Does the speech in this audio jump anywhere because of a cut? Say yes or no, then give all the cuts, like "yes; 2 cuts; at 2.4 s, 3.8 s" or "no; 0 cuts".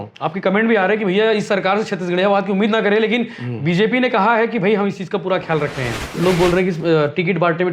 yes; 1 cut; at 6.0 s